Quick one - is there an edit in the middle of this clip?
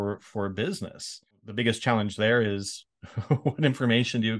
yes; 1 cut; at 1.5 s

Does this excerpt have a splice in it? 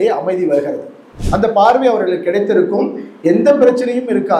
yes; 1 cut; at 1.2 s

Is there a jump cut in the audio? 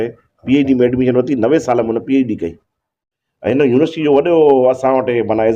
yes; 1 cut; at 3.1 s

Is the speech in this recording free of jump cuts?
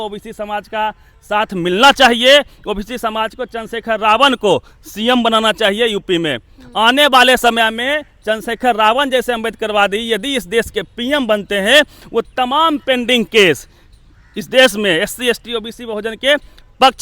yes; 0 cuts

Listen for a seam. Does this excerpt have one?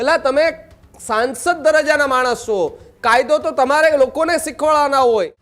no; 0 cuts

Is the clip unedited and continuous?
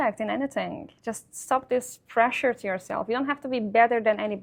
yes; 0 cuts

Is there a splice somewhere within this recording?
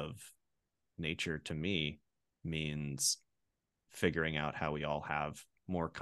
no; 0 cuts

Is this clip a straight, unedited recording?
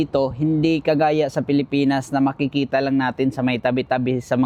yes; 0 cuts

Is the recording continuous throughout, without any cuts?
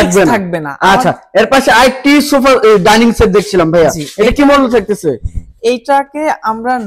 yes; 0 cuts

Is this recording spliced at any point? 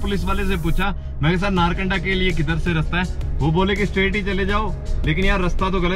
no; 0 cuts

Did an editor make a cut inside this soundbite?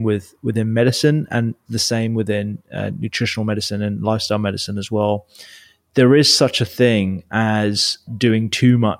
yes; 1 cut; at 8.1 s

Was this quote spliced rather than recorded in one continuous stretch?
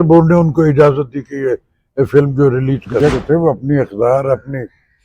yes; 1 cut; at 3.1 s

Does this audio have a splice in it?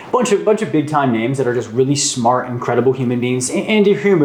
no; 0 cuts

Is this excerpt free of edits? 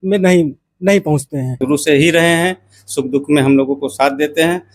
no; 1 cut; at 1.5 s

